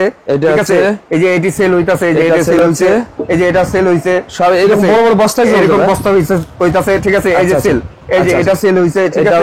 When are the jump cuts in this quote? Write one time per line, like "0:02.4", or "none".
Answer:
none